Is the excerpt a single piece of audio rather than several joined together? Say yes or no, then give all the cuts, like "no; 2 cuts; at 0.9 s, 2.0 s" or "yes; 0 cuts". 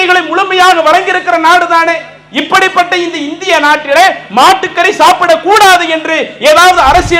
yes; 0 cuts